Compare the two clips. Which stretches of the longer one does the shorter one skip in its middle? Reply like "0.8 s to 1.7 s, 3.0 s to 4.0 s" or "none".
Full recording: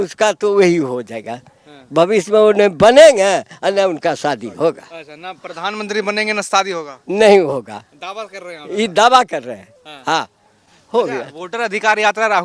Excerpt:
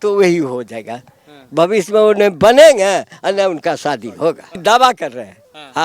5.0 s to 8.9 s